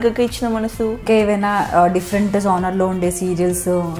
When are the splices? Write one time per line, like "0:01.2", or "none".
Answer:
0:01.0